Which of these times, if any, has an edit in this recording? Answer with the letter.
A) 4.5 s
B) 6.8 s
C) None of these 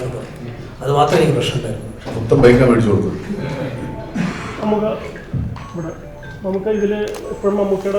C